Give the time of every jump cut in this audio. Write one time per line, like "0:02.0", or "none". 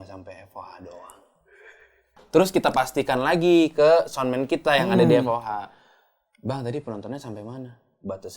0:02.1

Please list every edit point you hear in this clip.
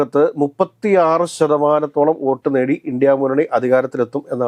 none

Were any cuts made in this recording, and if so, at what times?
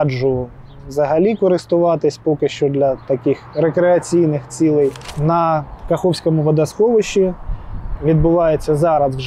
0:05.1

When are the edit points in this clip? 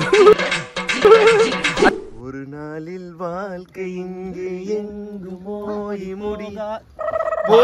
0:01.9

